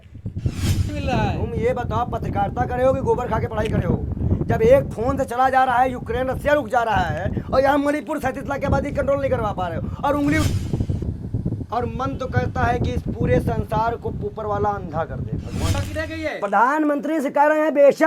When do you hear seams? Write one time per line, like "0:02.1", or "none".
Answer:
0:00.9
0:10.4
0:15.8